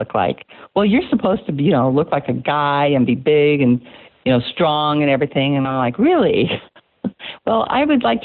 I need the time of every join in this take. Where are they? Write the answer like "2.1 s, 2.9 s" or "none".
none